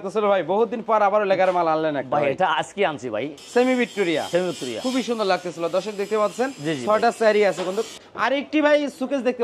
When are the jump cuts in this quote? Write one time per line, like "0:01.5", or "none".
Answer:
0:03.4
0:08.0